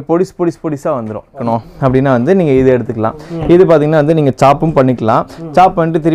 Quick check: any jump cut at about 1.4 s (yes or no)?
yes